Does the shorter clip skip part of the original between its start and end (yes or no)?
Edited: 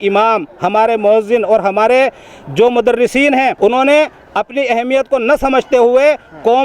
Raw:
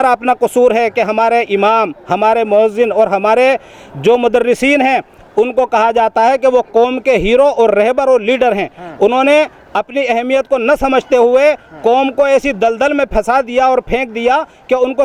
yes